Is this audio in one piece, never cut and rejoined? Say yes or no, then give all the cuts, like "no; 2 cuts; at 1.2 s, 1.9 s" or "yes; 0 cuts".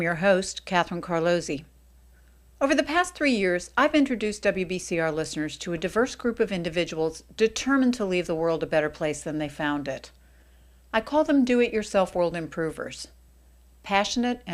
no; 1 cut; at 13.2 s